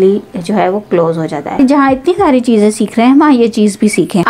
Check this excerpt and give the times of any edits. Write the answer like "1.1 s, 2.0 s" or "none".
1.6 s